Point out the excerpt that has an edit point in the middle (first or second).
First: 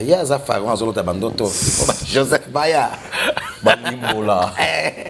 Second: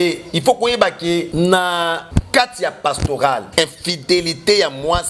second